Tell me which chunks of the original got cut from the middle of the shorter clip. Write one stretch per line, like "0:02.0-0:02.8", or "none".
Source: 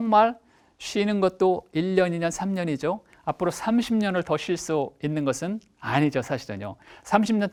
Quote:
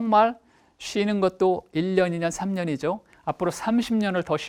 none

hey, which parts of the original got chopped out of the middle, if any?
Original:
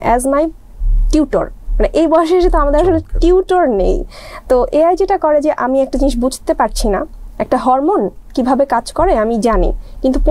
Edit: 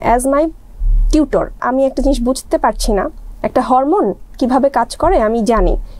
0:01.6-0:05.6

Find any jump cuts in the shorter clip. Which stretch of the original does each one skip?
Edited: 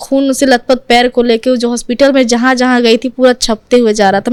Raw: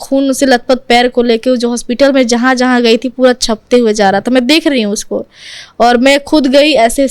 none

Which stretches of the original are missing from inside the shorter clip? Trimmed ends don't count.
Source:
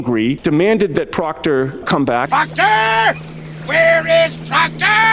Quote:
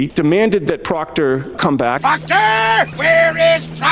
0:03.2-0:03.6

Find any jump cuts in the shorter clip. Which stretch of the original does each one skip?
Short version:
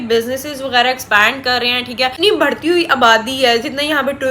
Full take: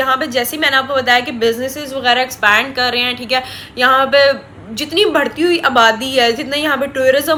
0:03.5-0:04.9

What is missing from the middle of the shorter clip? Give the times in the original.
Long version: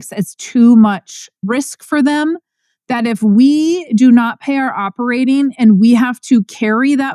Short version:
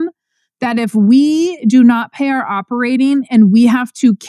none

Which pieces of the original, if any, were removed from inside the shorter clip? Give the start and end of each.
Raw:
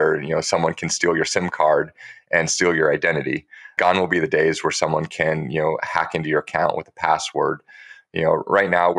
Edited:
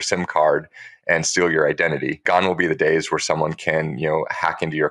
0:03.4-0:03.7

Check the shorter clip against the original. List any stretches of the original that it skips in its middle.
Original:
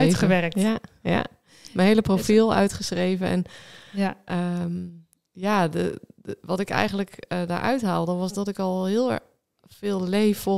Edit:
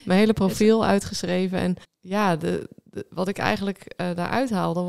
0:03.6-0:05.2

